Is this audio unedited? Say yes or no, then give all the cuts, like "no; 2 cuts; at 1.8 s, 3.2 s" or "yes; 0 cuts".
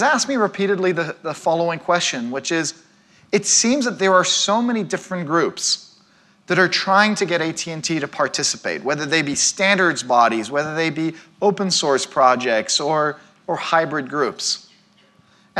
no; 1 cut; at 12.7 s